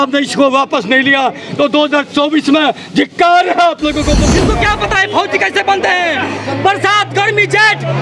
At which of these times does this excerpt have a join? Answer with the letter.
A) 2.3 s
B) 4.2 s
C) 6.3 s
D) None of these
B